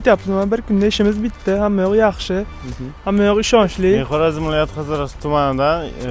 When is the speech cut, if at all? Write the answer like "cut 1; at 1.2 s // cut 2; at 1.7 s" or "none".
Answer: cut 1; at 4.1 s